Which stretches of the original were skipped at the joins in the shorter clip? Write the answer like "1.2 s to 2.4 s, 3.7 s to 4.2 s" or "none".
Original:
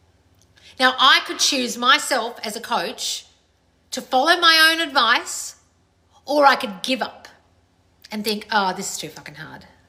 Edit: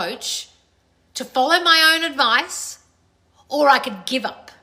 none